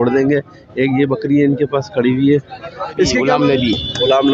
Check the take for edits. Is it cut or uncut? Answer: cut